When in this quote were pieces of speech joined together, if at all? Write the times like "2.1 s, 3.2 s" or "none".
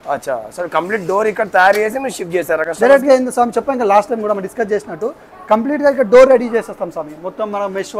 none